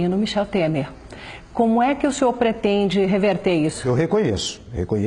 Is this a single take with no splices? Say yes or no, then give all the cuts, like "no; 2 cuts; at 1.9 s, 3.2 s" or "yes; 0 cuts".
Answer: no; 1 cut; at 3.8 s